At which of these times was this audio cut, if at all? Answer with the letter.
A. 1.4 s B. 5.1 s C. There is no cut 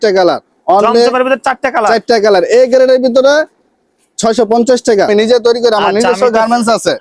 B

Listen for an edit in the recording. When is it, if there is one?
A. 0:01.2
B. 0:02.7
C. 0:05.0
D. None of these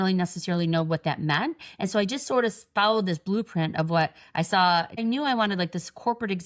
C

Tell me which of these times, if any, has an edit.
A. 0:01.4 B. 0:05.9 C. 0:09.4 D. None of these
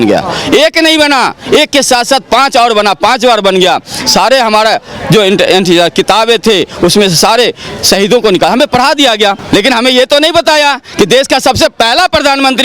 C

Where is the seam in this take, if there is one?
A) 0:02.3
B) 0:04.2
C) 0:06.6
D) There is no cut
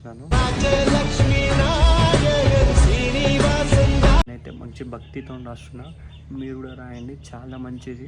B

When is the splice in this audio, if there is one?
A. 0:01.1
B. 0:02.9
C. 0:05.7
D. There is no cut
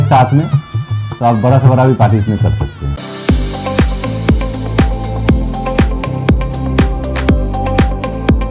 B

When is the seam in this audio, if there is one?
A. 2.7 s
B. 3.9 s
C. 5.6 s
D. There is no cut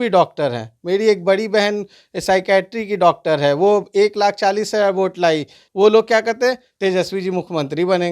C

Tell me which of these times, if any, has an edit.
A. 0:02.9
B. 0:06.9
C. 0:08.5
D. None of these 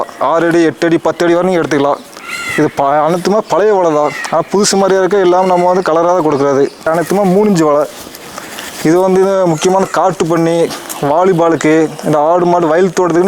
B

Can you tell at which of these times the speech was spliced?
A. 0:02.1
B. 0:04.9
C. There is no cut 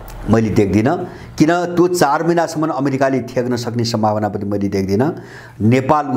C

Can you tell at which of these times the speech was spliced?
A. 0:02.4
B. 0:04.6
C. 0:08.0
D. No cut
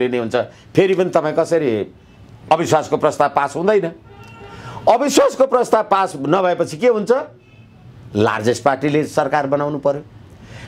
A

